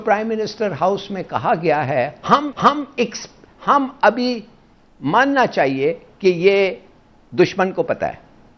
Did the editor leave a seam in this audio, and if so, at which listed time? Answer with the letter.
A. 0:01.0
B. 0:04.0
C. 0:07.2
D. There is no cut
D